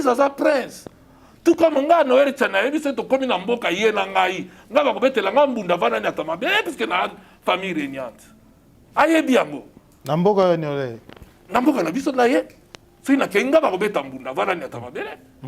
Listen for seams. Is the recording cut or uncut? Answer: uncut